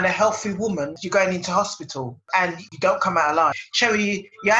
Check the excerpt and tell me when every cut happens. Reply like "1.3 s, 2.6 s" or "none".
1.0 s, 3.7 s

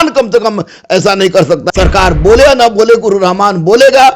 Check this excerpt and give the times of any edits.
1.6 s

